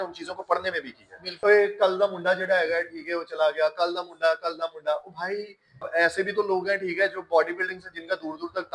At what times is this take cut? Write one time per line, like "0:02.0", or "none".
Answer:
0:01.3
0:05.9